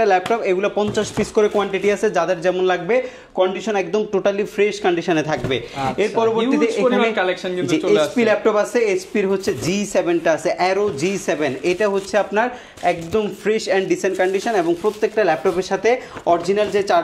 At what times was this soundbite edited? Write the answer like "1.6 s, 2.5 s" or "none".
none

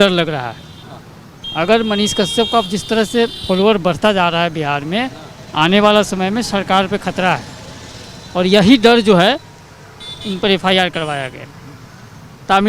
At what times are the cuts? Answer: none

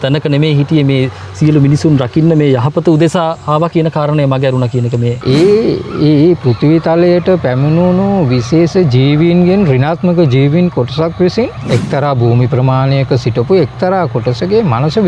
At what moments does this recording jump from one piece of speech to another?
5.2 s, 11.6 s

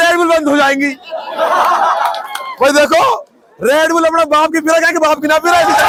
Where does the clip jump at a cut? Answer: none

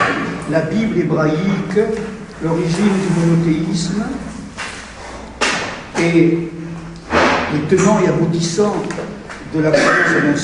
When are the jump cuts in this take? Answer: none

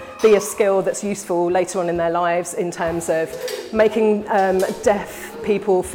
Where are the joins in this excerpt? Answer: none

